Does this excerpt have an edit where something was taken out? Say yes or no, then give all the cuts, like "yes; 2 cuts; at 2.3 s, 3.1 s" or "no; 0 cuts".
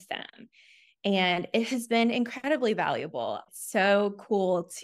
yes; 1 cut; at 3.5 s